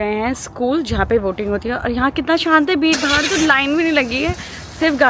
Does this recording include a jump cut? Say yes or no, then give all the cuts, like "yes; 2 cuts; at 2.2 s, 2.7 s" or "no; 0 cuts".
no; 0 cuts